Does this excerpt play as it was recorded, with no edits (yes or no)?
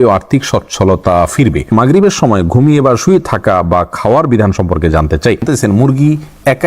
no